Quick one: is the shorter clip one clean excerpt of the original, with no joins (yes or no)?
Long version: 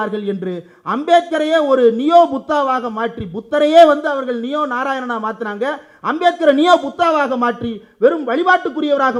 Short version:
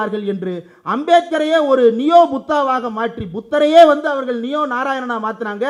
yes